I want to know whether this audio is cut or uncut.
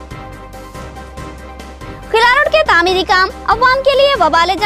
cut